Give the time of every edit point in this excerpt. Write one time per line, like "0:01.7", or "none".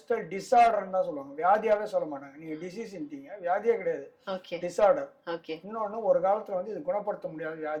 none